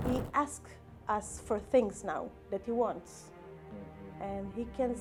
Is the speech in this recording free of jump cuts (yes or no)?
yes